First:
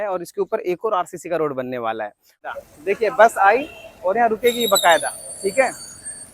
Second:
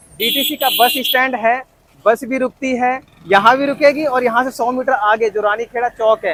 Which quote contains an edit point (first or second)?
first